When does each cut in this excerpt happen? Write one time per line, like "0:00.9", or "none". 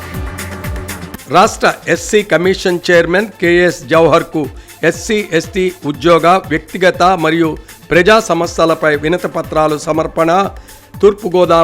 0:00.9